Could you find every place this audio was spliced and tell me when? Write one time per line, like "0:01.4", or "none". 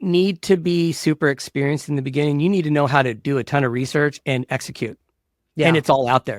none